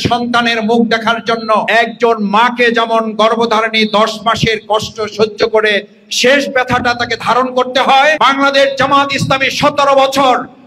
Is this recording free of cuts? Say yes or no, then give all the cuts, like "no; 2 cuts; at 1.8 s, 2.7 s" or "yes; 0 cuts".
yes; 0 cuts